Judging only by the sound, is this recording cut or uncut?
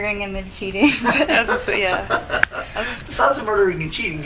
uncut